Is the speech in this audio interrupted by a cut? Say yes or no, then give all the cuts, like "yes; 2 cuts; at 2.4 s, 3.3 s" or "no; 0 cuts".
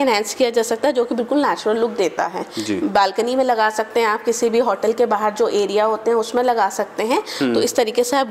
no; 0 cuts